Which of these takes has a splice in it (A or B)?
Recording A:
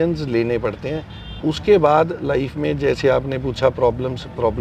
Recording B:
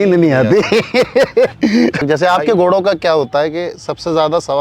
B